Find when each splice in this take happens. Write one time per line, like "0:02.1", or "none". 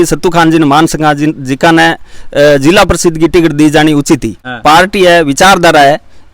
0:04.5